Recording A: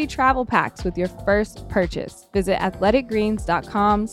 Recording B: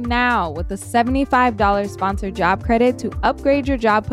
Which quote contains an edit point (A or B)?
A